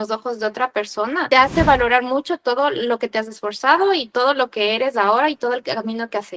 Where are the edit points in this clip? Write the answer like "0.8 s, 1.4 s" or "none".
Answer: none